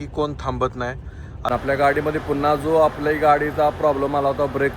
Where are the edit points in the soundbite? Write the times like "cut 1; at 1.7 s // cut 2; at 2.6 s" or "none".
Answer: cut 1; at 1.4 s